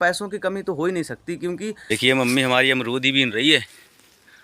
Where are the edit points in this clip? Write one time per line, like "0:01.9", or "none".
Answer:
0:01.7